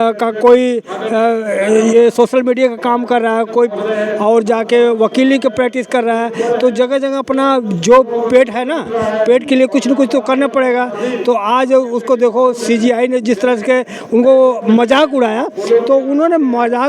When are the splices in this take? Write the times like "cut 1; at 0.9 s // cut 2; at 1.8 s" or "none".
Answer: none